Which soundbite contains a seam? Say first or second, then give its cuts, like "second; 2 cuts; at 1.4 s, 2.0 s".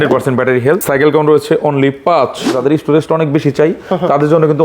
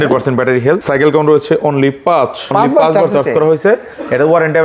first; 1 cut; at 2.5 s